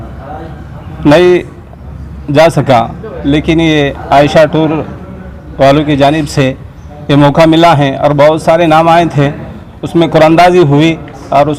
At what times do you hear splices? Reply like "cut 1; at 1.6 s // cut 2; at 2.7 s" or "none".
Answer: none